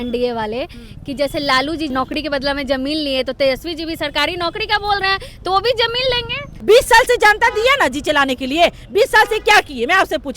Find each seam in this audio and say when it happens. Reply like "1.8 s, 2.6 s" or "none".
1.9 s, 6.5 s